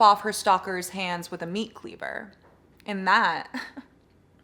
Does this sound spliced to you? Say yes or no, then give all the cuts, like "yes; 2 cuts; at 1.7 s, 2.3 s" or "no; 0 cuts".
no; 0 cuts